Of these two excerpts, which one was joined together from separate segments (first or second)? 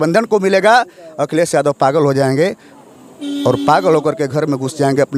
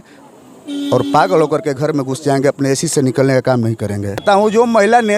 second